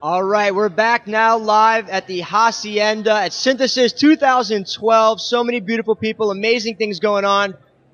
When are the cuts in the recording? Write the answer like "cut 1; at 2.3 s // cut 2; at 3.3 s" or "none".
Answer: none